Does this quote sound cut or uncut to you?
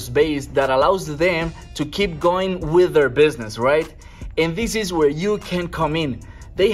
uncut